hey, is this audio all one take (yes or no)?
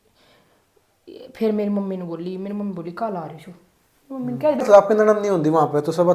no